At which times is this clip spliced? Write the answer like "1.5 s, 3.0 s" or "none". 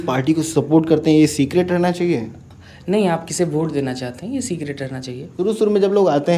5.3 s